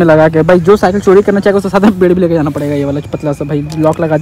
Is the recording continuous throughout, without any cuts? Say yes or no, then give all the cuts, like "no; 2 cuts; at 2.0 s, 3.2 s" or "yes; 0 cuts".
yes; 0 cuts